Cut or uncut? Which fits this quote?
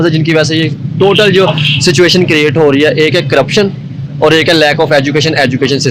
uncut